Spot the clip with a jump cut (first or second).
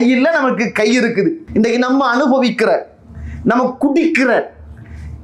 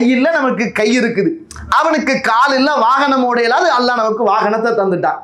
first